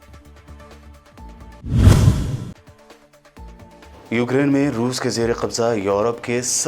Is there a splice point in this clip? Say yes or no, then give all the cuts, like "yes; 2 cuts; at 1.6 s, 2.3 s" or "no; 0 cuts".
yes; 1 cut; at 1.3 s